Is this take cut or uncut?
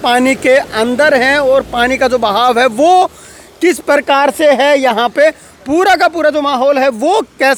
uncut